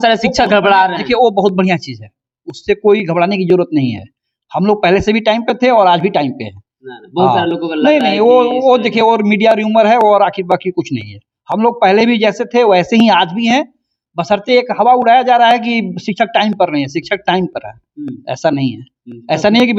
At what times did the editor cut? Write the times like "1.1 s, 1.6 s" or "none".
none